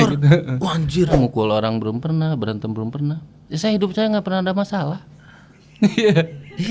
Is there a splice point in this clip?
yes; 1 cut; at 1.1 s

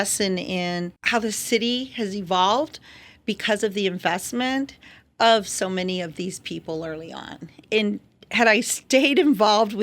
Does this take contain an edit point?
yes; 2 cuts; at 1.0 s, 7.5 s

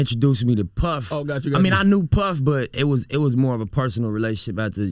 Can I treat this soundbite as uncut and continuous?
yes; 0 cuts

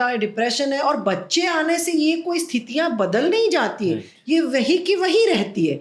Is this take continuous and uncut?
yes; 0 cuts

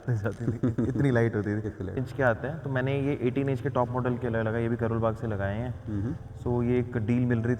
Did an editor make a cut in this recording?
yes; 1 cut; at 2.0 s

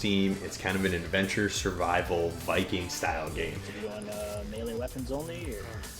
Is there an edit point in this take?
yes; 1 cut; at 3.7 s

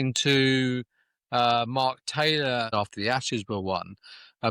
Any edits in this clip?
yes; 1 cut; at 2.7 s

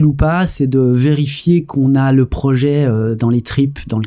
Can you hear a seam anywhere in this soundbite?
no; 0 cuts

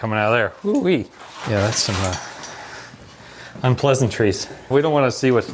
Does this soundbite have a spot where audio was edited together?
yes; 2 cuts; at 1.1 s, 4.7 s

